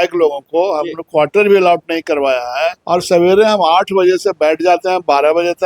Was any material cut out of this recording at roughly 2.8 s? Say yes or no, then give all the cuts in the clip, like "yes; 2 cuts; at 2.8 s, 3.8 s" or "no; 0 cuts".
yes; 1 cut; at 2.8 s